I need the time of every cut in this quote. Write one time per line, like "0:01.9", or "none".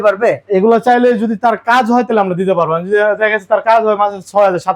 none